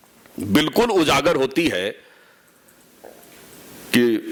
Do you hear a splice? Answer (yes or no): no